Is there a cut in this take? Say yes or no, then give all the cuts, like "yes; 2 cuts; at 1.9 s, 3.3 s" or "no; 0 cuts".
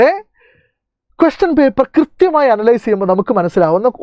no; 0 cuts